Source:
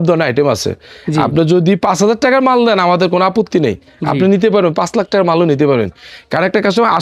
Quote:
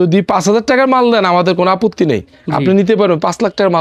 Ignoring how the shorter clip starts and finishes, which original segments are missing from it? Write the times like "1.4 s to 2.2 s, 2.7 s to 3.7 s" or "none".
none